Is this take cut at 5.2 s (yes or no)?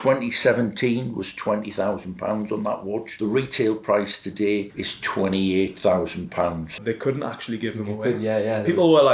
no